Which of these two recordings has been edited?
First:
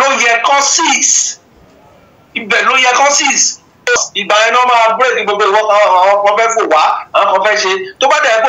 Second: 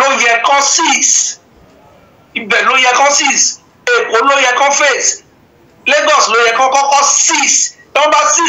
first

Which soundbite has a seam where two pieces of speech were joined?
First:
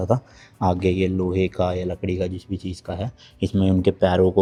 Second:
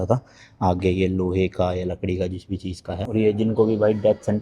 second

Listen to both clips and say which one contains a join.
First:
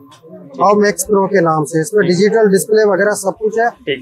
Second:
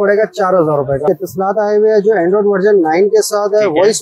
second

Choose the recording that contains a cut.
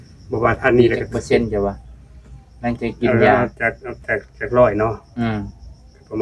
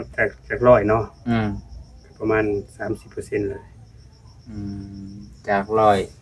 first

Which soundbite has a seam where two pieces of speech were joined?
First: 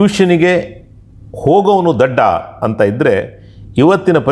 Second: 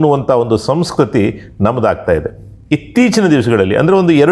second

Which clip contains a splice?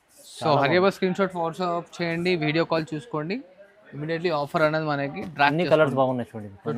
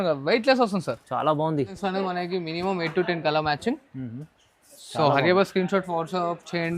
second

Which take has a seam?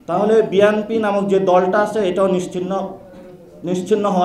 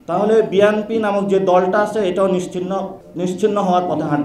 second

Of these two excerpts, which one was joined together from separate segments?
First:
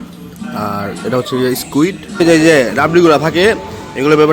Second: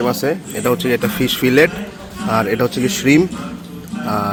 first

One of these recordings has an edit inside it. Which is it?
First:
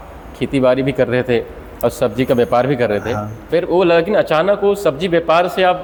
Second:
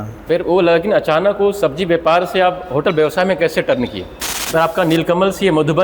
second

